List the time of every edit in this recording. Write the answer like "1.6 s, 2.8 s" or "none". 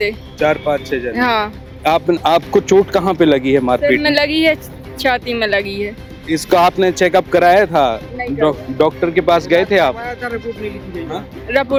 none